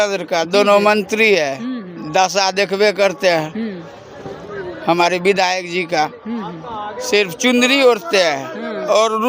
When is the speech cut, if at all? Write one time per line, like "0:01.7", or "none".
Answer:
none